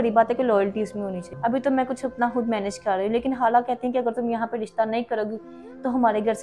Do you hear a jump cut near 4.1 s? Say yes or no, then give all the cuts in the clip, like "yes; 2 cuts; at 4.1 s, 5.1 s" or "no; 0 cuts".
no; 1 cut; at 1.3 s